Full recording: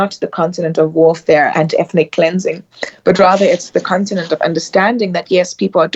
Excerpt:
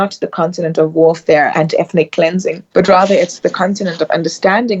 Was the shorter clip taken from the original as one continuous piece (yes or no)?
no